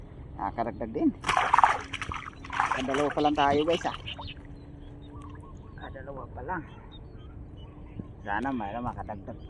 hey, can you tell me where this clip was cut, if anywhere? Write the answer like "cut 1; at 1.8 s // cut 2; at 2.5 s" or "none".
none

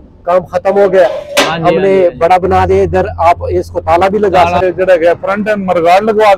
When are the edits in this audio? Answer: cut 1; at 4.6 s

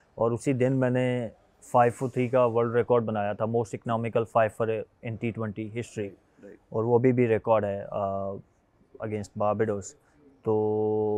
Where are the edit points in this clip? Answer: none

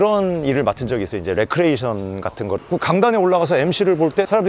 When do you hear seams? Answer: cut 1; at 2.6 s

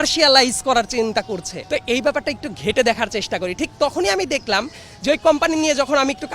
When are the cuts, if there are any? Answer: cut 1; at 1.5 s

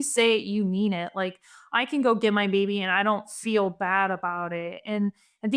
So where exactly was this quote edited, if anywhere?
none

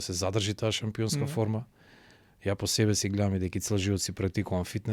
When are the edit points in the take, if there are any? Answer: none

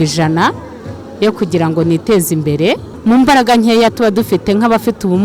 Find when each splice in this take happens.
cut 1; at 2.9 s

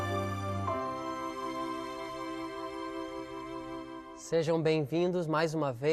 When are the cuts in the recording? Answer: none

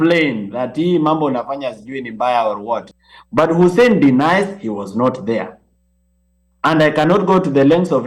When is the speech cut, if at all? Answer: cut 1; at 2.9 s

